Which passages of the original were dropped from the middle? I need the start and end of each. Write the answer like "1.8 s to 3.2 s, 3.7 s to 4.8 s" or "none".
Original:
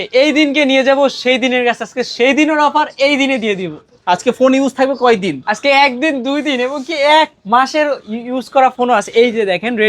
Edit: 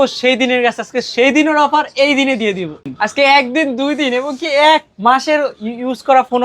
3.9 s to 5.3 s